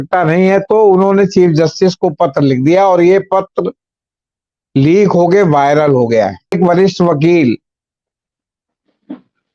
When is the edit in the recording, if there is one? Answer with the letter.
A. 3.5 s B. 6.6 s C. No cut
B